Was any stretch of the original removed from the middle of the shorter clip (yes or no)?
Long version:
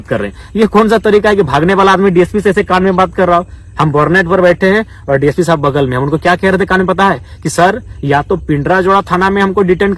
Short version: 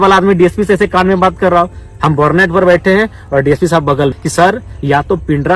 yes